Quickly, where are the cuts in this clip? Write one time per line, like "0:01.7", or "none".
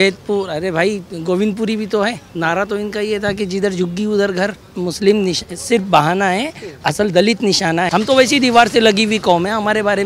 0:02.3
0:04.7
0:07.9